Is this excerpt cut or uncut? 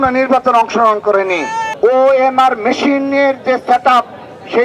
cut